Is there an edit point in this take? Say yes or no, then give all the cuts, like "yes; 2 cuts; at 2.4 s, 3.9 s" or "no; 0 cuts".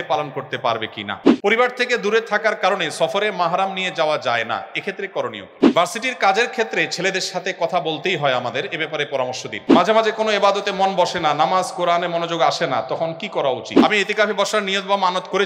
yes; 4 cuts; at 1.3 s, 5.5 s, 9.7 s, 13.7 s